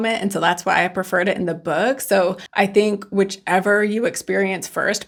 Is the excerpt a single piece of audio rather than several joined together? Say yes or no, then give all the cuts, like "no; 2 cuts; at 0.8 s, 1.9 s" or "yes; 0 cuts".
yes; 0 cuts